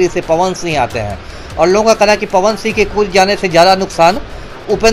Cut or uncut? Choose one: uncut